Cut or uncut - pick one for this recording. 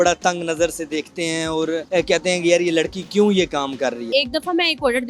cut